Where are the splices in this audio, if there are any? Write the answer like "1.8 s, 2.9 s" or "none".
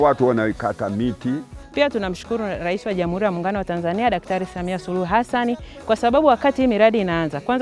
1.5 s